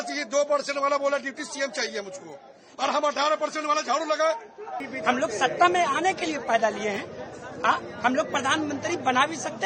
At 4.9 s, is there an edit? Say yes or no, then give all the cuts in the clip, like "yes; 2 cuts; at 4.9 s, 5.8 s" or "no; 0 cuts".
yes; 1 cut; at 4.9 s